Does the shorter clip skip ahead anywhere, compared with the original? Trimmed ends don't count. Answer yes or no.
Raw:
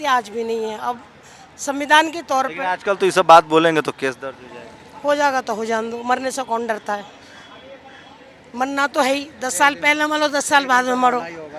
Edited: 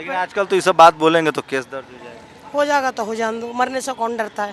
no